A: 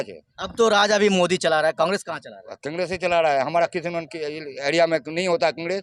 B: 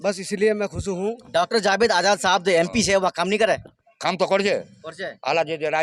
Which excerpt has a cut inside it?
B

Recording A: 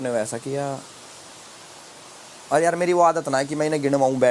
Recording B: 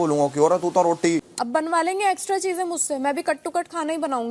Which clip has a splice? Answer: B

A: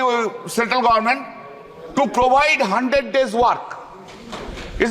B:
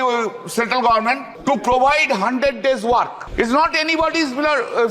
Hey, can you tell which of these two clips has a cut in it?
B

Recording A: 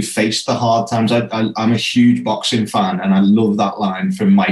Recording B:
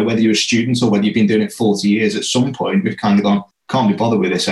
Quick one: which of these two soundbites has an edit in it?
B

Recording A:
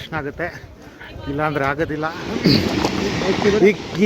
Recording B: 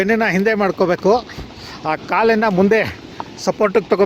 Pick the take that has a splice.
A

